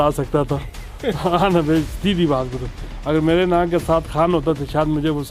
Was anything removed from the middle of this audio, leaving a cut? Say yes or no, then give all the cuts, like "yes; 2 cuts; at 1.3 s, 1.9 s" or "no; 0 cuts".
no; 0 cuts